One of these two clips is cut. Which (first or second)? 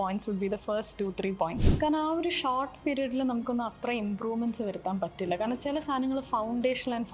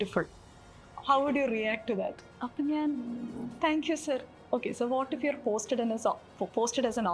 first